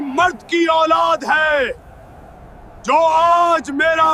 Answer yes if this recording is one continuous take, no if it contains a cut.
yes